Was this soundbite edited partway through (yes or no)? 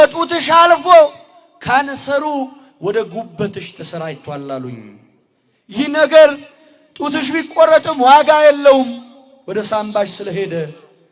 no